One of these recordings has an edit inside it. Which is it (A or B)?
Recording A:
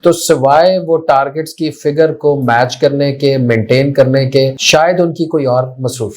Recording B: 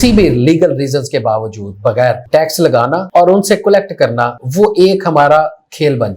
A